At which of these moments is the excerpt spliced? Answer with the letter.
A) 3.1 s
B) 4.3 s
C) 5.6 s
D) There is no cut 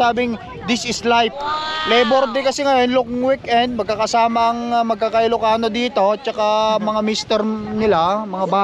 D